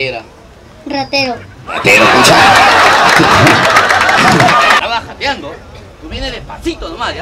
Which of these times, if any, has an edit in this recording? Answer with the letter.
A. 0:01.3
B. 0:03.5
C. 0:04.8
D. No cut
C